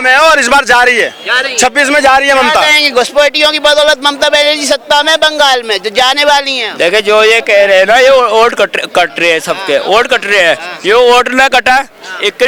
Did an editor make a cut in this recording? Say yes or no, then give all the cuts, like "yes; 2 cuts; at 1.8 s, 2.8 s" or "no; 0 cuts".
no; 0 cuts